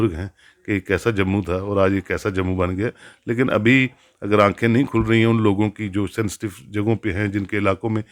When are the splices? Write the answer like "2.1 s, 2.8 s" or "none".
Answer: none